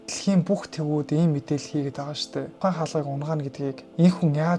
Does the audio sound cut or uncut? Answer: cut